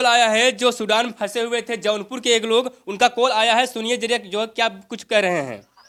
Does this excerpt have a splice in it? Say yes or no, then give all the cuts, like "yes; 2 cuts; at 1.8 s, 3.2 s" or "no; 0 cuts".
no; 0 cuts